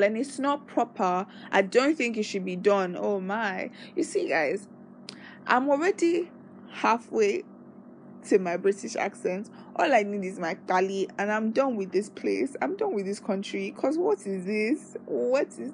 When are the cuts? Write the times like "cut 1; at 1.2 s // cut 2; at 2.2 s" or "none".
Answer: none